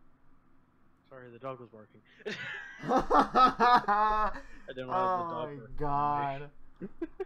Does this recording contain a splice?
no; 0 cuts

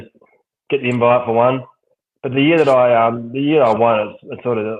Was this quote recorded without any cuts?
yes; 0 cuts

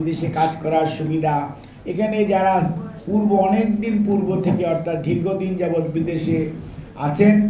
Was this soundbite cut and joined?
no; 0 cuts

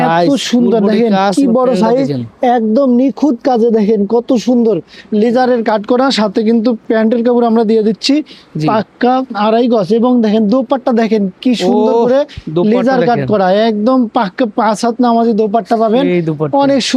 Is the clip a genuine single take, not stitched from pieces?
yes; 0 cuts

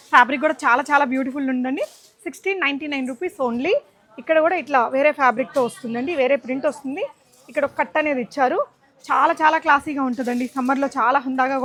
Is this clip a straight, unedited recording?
yes; 0 cuts

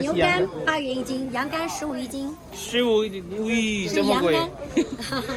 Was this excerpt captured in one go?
yes; 0 cuts

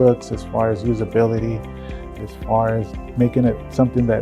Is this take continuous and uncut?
no; 2 cuts; at 2.1 s, 3.1 s

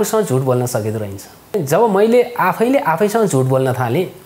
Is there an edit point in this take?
yes; 1 cut; at 1.6 s

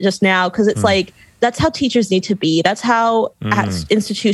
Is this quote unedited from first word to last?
no; 1 cut; at 1.3 s

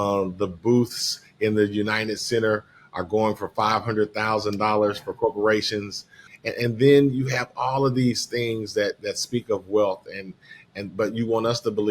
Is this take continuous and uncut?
no; 1 cut; at 6.3 s

